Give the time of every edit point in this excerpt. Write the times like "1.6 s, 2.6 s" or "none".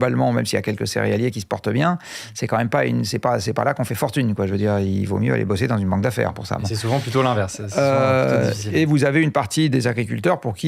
none

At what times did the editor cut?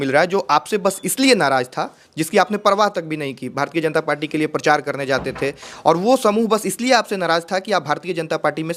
none

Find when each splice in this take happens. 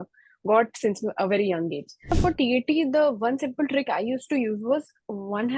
2.1 s

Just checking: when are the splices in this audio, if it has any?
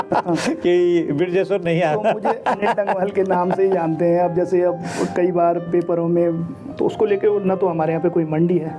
6.6 s

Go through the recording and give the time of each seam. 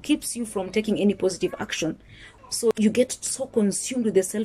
2.3 s

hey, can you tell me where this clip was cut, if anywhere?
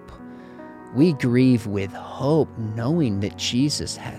none

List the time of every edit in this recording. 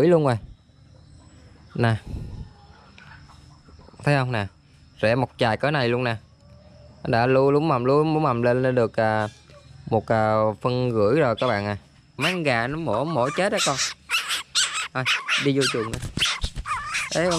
12.2 s

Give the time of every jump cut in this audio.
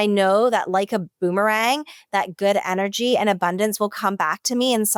none

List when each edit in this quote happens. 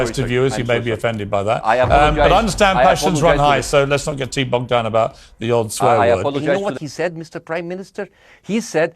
6.6 s

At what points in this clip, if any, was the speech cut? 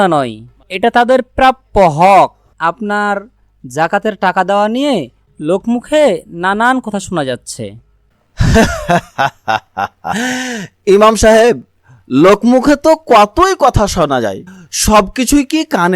2.5 s

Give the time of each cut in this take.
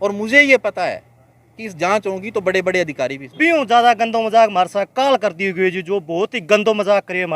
3.2 s

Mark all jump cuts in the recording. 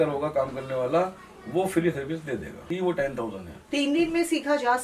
2.7 s

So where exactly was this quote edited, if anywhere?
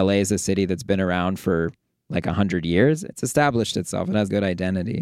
3.0 s, 4.3 s

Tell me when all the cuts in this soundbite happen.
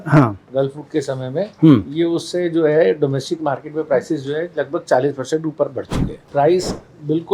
6.2 s

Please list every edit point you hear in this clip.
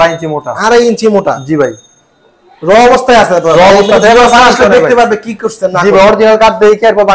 none

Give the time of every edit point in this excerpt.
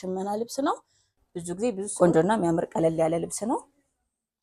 1.9 s

